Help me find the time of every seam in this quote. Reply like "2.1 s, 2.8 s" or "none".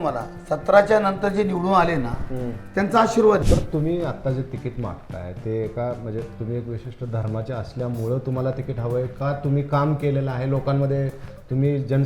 3.4 s